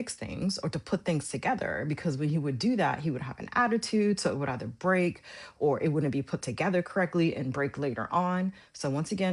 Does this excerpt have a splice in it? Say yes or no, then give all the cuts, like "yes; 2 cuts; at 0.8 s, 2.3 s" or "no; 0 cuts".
no; 0 cuts